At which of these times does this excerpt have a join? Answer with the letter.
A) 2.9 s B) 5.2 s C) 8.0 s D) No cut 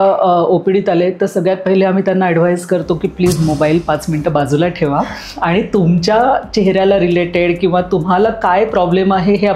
D